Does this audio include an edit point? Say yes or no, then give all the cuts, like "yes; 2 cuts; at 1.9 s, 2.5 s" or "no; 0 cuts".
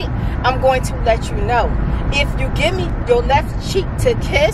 yes; 1 cut; at 2.9 s